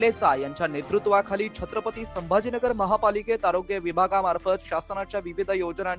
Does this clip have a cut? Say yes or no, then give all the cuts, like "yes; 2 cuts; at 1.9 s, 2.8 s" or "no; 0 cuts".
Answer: no; 0 cuts